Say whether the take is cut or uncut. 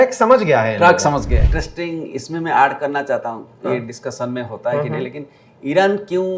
cut